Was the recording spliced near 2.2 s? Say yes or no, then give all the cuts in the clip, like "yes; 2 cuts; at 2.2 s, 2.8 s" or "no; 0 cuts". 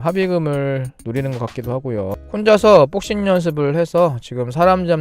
yes; 1 cut; at 2.2 s